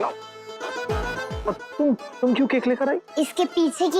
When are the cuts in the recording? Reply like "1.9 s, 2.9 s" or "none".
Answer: 1.4 s